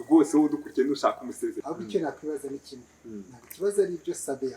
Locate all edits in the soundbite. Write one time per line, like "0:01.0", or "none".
0:01.6